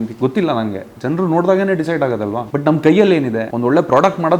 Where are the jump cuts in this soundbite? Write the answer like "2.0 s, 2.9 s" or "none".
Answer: 2.5 s, 3.5 s